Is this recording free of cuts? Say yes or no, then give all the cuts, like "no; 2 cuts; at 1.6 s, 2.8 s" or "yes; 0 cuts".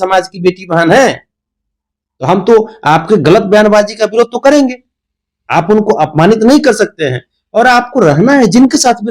yes; 0 cuts